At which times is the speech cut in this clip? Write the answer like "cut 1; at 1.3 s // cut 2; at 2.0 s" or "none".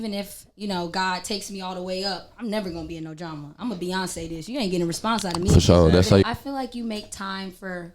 cut 1; at 6.2 s